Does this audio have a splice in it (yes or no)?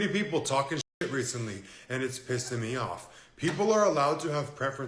no